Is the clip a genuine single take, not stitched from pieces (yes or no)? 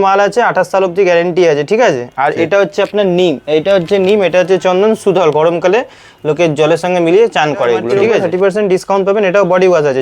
no